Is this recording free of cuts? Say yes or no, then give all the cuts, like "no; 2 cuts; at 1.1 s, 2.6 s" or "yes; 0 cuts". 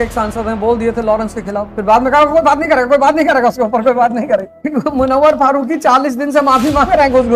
no; 2 cuts; at 1.6 s, 4.6 s